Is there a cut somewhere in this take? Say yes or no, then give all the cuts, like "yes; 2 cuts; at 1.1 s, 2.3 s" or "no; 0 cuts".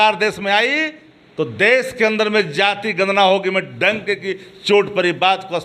no; 0 cuts